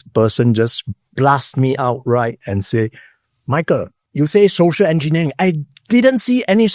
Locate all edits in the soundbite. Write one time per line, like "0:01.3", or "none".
0:04.0